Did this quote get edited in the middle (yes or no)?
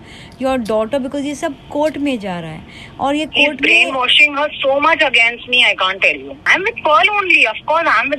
yes